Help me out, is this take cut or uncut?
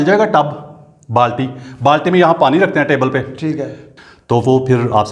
cut